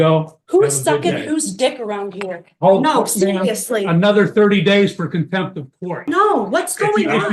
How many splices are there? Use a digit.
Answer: 1